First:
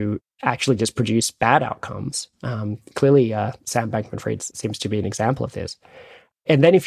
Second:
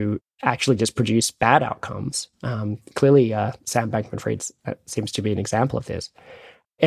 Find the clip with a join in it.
first; 1 cut; at 4.5 s

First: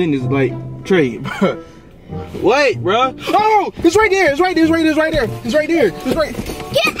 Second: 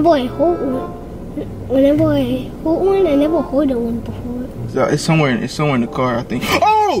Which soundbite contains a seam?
second; 1 cut; at 4.6 s

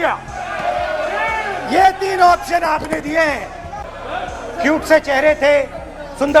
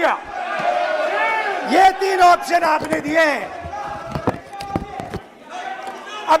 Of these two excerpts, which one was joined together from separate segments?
first; 1 cut; at 3.9 s

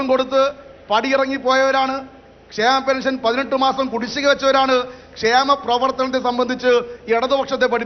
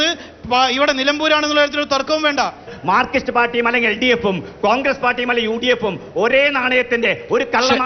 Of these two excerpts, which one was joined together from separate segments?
second; 1 cut; at 2.7 s

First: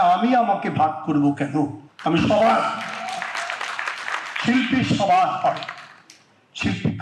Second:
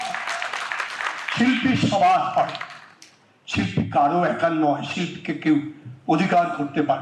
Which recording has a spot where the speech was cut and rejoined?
first; 1 cut; at 1.9 s

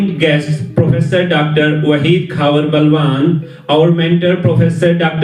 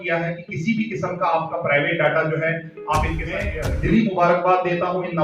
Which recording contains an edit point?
second; 1 cut; at 3.5 s

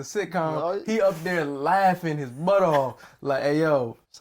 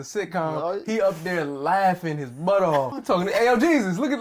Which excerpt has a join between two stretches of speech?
second; 1 cut; at 3.0 s

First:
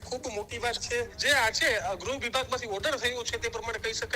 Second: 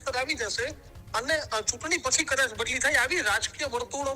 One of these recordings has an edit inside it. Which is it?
first; 1 cut; at 1.2 s

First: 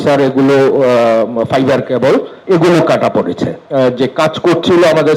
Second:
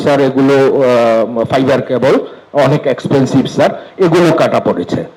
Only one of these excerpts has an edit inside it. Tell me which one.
first; 2 cuts; at 2.3 s, 3.6 s

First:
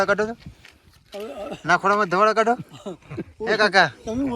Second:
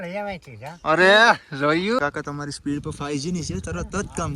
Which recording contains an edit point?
second; 1 cut; at 2.0 s

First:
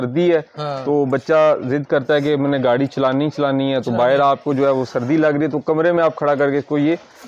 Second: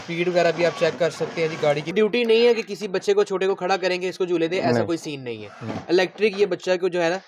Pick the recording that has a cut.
second; 1 cut; at 1.9 s

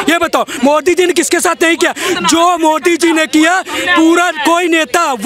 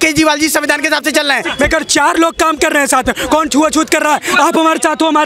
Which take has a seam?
second; 1 cut; at 1.4 s

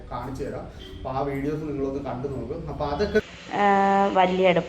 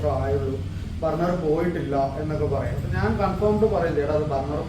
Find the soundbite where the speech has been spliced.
first; 1 cut; at 3.2 s

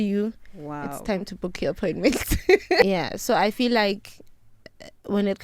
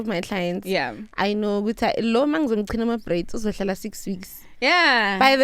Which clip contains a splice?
first; 1 cut; at 2.8 s

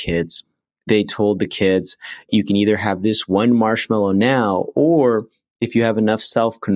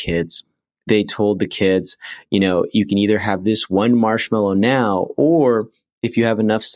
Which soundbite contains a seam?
first; 1 cut; at 2.3 s

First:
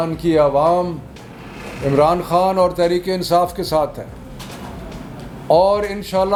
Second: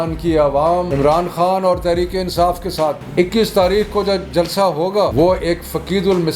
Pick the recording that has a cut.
second; 3 cuts; at 0.9 s, 3.0 s, 5.1 s

